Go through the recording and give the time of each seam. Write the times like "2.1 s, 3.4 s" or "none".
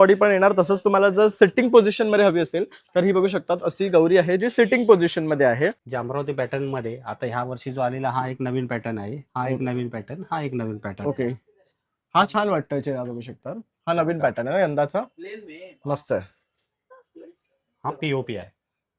5.8 s, 16.9 s

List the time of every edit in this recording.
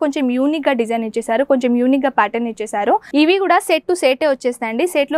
3.1 s

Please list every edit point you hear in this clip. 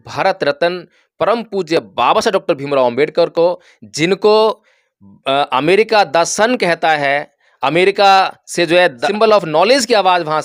9.1 s

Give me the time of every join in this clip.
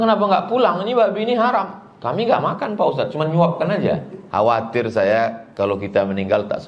4.2 s

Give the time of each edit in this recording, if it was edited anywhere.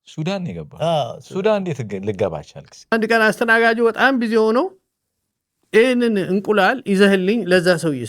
2.9 s

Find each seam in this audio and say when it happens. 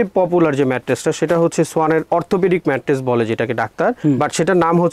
none

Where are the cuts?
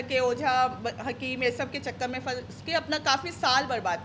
none

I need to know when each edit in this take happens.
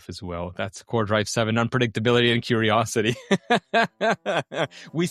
none

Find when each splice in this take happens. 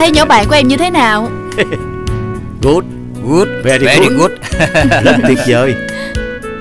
none

